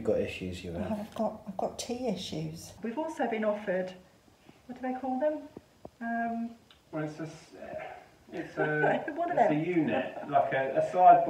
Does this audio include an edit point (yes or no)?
yes